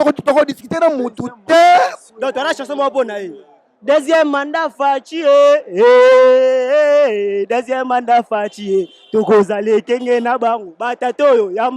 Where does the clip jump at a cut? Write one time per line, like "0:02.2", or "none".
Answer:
0:02.0